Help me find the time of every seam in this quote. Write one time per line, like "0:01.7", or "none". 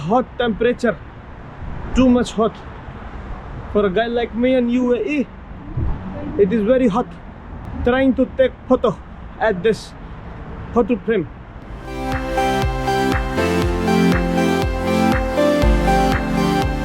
none